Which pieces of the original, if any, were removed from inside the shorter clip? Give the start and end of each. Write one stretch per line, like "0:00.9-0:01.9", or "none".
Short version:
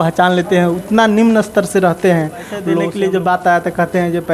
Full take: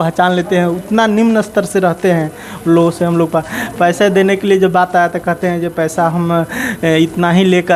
0:02.8-0:04.2